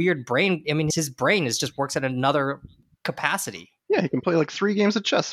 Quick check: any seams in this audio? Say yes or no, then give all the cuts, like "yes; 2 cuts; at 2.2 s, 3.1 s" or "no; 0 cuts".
no; 0 cuts